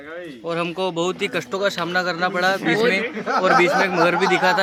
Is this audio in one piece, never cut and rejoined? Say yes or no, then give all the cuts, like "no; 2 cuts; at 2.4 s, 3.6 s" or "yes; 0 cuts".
yes; 0 cuts